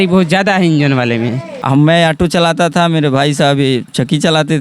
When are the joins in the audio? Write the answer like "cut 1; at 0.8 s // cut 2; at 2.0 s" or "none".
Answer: cut 1; at 1.5 s